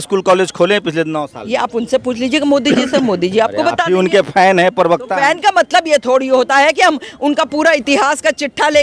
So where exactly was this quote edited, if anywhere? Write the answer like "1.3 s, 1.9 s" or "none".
none